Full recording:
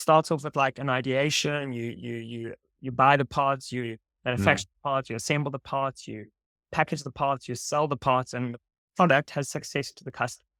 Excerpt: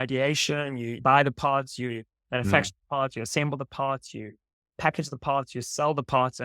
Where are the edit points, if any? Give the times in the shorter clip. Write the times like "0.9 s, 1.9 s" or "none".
1.0 s